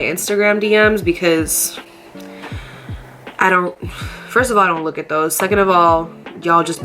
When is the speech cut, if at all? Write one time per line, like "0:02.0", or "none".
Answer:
none